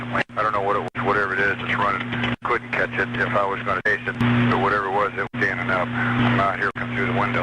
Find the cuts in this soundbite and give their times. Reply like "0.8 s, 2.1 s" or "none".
0.9 s, 2.4 s, 3.8 s, 5.3 s, 6.7 s